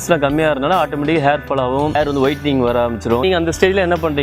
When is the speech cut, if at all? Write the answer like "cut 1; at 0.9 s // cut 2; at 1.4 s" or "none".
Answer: cut 1; at 2.0 s // cut 2; at 3.2 s